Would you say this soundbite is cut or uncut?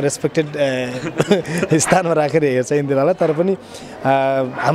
uncut